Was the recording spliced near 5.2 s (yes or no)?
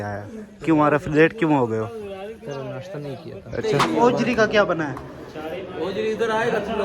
no